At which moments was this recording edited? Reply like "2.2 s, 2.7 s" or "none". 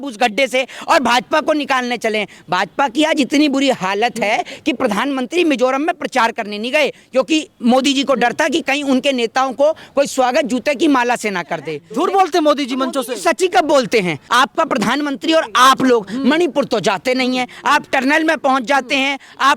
11.8 s, 14.2 s